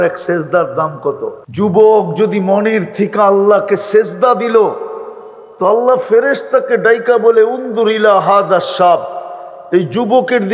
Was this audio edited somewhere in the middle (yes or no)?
yes